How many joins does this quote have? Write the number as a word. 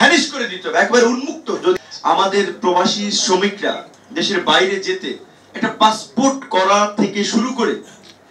one